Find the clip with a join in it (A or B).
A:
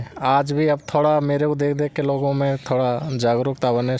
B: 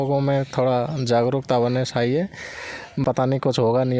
B